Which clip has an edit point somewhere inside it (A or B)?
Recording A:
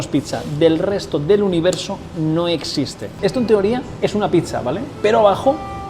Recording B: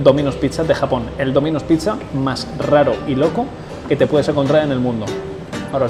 A